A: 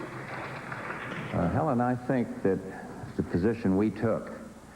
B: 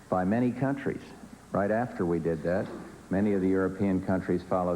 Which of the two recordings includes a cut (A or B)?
A